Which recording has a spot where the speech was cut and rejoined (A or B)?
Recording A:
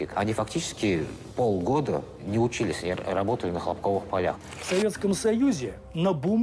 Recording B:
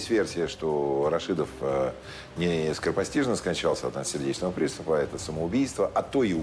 A